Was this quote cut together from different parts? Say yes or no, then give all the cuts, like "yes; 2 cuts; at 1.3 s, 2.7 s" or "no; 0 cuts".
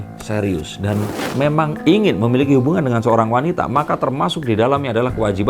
no; 0 cuts